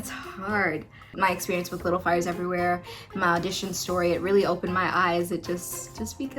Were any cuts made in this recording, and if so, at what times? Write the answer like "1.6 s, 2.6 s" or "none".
1.1 s